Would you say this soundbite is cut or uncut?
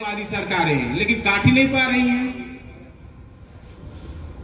uncut